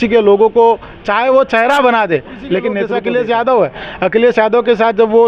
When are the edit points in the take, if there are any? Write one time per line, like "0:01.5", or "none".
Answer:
0:02.8